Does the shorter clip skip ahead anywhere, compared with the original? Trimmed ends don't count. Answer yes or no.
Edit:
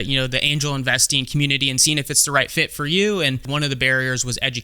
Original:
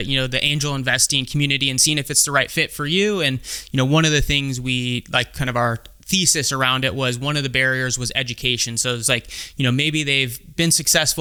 yes